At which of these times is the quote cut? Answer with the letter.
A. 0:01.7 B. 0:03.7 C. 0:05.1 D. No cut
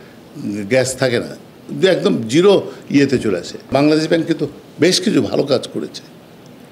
B